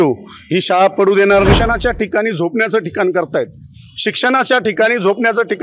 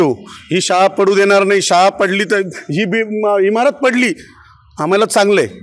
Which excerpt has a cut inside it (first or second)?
first